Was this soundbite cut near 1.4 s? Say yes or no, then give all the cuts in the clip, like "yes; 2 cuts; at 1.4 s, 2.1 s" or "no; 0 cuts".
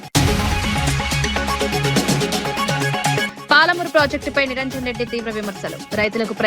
yes; 2 cuts; at 1.4 s, 2.8 s